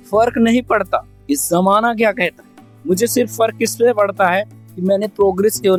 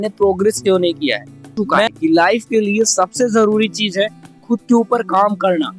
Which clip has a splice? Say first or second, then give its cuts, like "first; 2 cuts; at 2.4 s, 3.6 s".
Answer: second; 1 cut; at 1.9 s